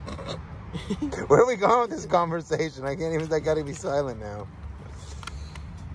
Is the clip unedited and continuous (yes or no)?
yes